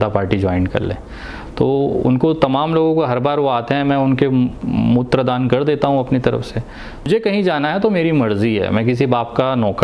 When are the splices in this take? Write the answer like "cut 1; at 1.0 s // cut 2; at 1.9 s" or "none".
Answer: cut 1; at 7.1 s